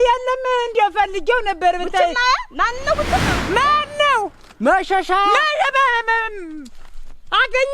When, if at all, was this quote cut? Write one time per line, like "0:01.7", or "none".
0:03.3